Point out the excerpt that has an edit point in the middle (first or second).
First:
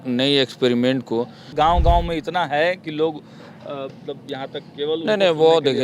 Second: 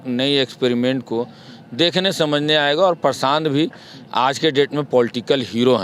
first